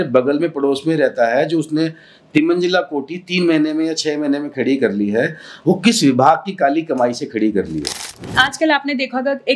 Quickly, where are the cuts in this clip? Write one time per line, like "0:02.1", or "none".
0:08.4

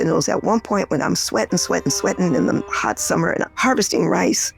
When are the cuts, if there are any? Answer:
0:03.5

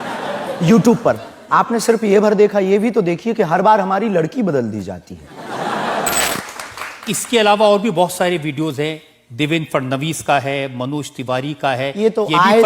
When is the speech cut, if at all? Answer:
0:06.3

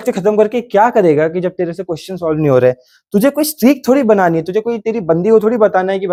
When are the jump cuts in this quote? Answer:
none

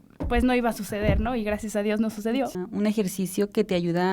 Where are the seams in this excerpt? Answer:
0:02.6

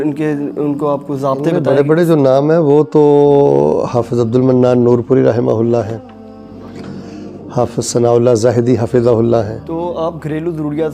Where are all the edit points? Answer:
0:01.6
0:09.6

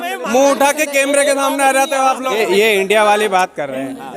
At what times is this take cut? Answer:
0:02.4

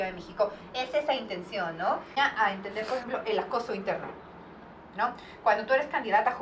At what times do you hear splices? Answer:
0:02.1

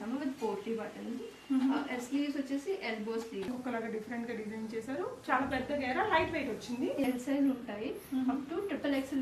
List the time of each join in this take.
0:03.6
0:07.1

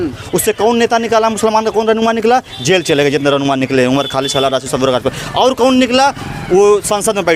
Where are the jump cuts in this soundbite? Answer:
none

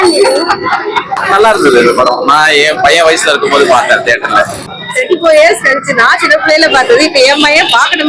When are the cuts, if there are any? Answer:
0:01.1
0:04.7

